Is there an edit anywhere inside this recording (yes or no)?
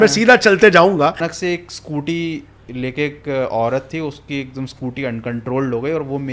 yes